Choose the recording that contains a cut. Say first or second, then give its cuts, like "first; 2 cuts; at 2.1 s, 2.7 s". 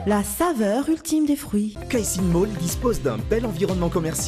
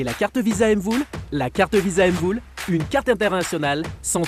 first; 1 cut; at 1.8 s